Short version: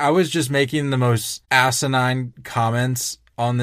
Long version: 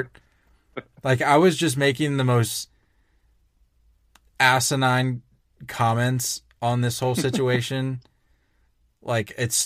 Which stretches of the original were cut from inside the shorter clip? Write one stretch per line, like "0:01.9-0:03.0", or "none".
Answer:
0:02.6-0:04.2
0:05.3-0:05.6